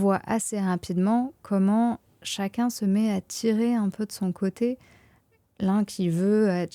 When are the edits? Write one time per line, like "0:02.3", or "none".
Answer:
none